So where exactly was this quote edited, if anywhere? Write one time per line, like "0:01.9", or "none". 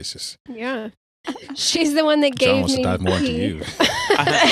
0:01.2